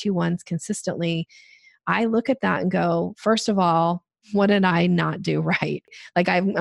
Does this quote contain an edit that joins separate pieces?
yes; 2 cuts; at 4.1 s, 5.9 s

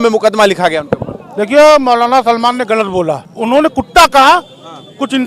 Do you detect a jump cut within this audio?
yes; 1 cut; at 3.3 s

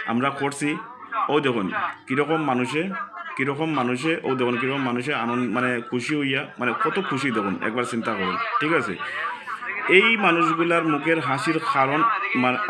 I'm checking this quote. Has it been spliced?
no; 0 cuts

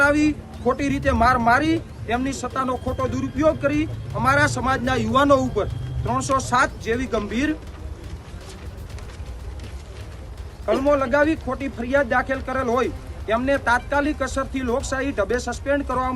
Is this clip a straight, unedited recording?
yes; 0 cuts

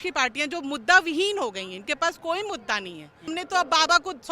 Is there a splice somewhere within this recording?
yes; 1 cut; at 3.3 s

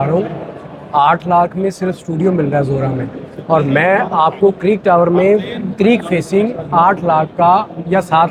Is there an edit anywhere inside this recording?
no; 0 cuts

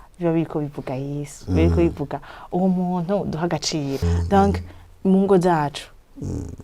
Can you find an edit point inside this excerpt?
yes; 1 cut; at 4.1 s

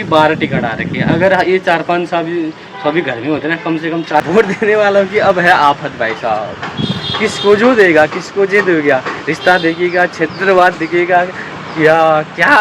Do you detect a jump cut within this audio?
yes; 1 cut; at 4.3 s

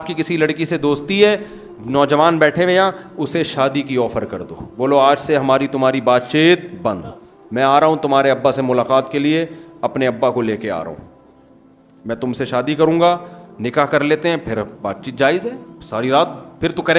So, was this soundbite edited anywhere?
no; 0 cuts

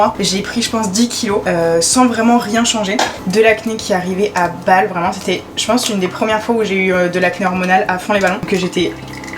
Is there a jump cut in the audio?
no; 0 cuts

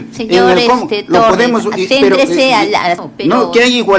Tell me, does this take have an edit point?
yes; 1 cut; at 3.0 s

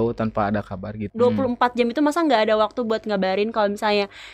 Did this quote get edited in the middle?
yes; 1 cut; at 1.0 s

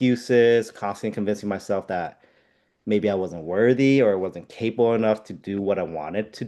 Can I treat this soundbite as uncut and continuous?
yes; 0 cuts

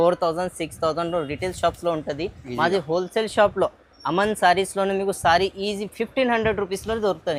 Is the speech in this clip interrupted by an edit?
no; 0 cuts

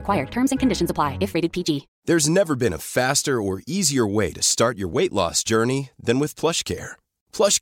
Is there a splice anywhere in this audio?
yes; 1 cut; at 1.9 s

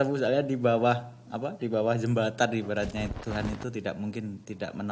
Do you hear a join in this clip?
yes; 1 cut; at 3.1 s

